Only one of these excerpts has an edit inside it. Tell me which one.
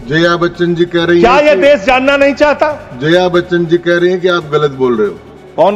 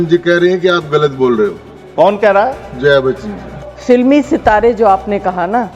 second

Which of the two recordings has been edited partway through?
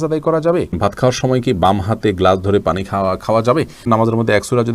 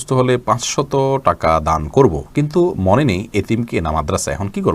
first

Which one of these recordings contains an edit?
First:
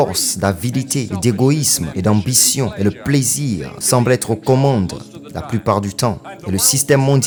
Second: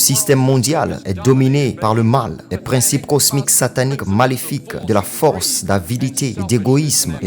second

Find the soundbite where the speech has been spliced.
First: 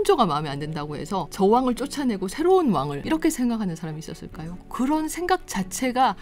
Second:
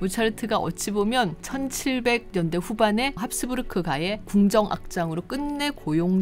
first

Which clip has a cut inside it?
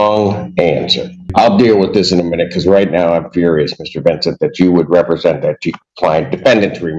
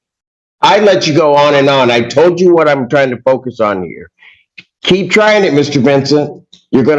first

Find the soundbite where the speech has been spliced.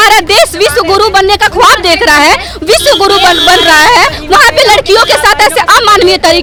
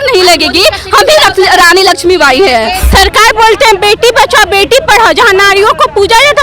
second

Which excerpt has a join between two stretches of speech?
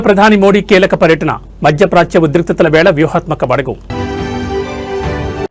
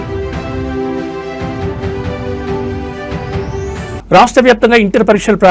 second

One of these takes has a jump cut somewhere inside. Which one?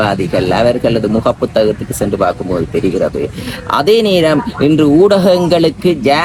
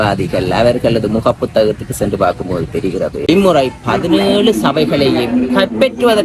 second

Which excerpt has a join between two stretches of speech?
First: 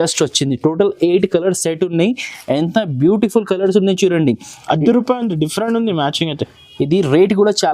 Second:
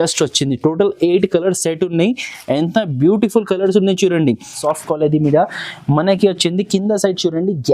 second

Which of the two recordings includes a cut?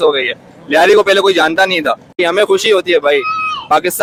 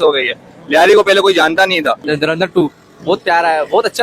second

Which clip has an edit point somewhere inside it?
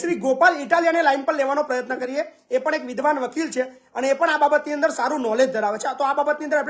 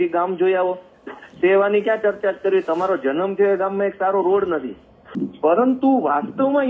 second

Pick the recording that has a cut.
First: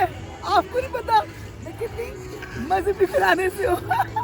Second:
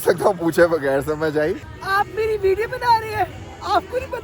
second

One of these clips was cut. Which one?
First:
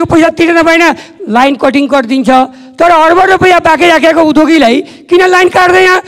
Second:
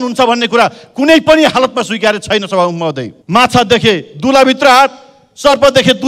second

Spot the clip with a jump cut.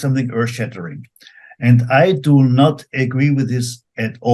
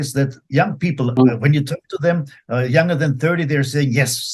second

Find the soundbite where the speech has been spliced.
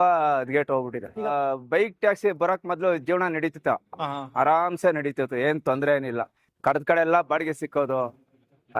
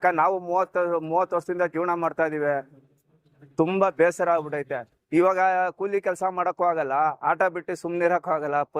first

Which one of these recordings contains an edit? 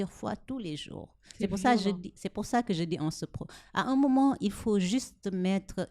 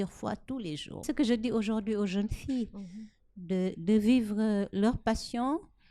second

